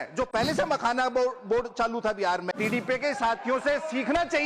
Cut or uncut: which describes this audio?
cut